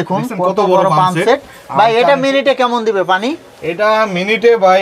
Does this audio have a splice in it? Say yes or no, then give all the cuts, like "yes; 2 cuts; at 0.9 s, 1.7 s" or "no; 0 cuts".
no; 0 cuts